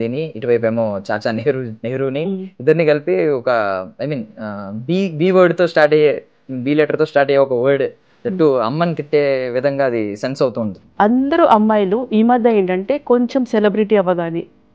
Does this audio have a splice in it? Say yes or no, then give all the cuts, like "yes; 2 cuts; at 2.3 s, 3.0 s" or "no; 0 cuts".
yes; 1 cut; at 10.8 s